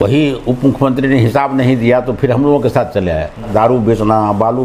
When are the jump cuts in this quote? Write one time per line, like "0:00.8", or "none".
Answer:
0:03.5